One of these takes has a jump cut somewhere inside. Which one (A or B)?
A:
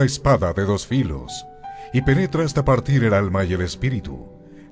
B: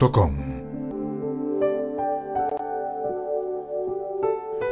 B